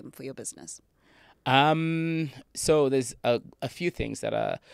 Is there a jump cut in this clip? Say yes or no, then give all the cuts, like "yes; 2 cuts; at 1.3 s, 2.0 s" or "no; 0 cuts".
no; 0 cuts